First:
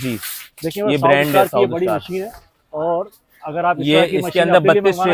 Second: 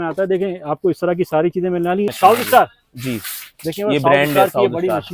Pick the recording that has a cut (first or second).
second